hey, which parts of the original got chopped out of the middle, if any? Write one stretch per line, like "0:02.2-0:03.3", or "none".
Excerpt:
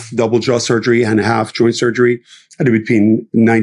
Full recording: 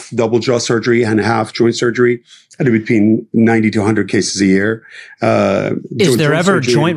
none